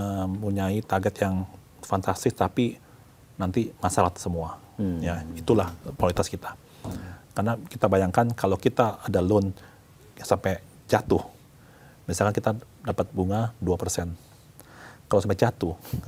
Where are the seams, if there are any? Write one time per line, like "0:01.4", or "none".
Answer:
none

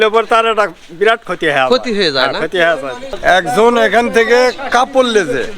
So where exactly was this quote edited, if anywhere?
0:03.1

